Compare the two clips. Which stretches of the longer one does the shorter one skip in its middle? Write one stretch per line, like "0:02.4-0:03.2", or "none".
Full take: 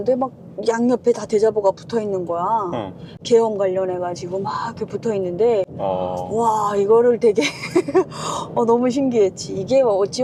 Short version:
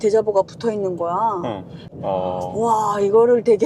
0:03.2-0:05.7